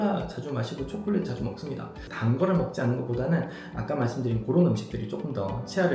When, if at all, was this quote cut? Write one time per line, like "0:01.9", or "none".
0:02.0